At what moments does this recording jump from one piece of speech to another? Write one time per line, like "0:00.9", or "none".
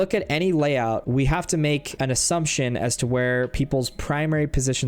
0:01.0
0:01.9